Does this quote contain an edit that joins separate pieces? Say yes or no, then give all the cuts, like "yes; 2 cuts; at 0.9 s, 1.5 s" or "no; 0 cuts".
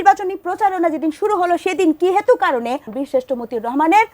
yes; 1 cut; at 2.9 s